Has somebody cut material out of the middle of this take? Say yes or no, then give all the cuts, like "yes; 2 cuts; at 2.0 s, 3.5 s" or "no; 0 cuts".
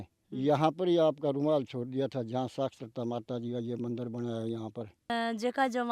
no; 0 cuts